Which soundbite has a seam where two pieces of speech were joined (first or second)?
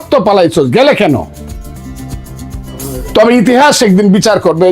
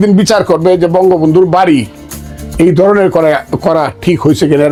first